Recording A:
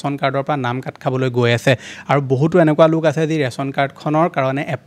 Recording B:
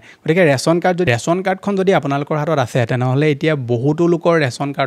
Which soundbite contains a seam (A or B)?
B